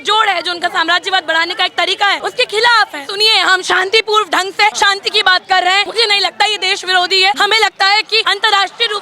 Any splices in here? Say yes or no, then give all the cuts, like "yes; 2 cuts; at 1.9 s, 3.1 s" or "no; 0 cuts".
yes; 6 cuts; at 2.2 s, 3.1 s, 4.8 s, 5.9 s, 7.4 s, 8.2 s